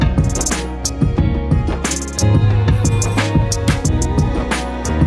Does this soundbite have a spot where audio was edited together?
no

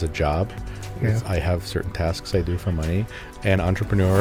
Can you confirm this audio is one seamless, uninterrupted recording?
yes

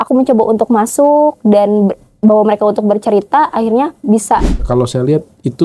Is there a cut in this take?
yes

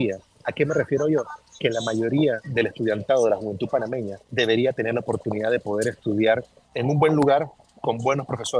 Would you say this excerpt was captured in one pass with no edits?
no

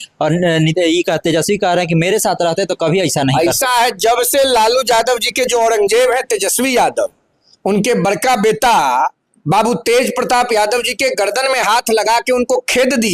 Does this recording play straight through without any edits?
yes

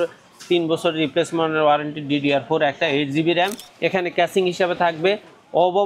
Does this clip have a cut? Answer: yes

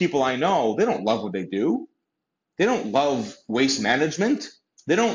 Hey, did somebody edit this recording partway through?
no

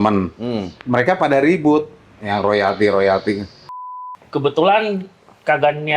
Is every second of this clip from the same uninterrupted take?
no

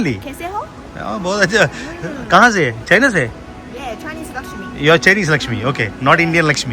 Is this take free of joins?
yes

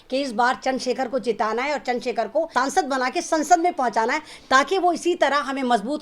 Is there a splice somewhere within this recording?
yes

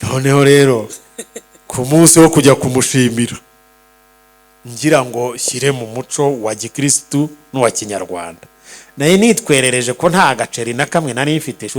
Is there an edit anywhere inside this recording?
no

